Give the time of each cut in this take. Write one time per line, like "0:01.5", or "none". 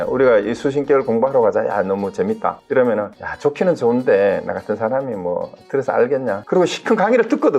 0:02.6
0:03.2
0:06.4